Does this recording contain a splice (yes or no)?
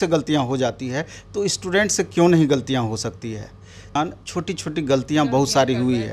yes